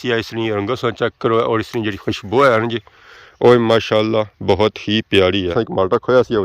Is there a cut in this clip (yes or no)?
yes